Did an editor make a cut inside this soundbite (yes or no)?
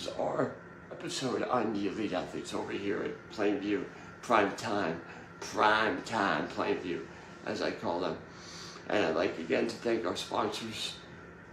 yes